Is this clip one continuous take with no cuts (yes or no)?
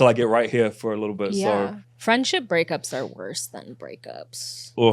no